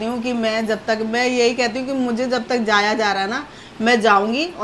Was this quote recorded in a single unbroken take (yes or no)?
yes